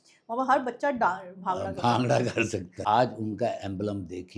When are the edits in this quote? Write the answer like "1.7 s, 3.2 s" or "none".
2.7 s